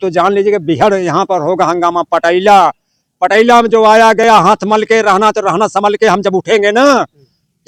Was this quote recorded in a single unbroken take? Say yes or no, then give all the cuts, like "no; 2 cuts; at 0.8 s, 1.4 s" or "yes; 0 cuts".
yes; 0 cuts